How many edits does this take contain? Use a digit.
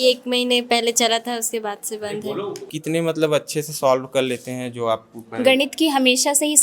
1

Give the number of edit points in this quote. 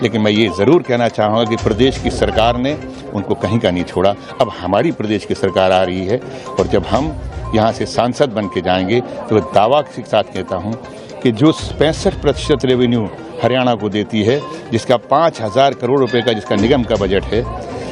0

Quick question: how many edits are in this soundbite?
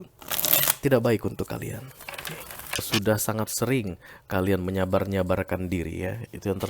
1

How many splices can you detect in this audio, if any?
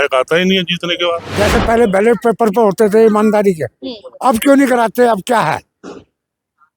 1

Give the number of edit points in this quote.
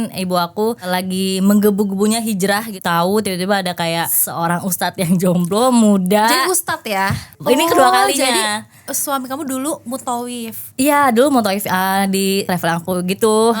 5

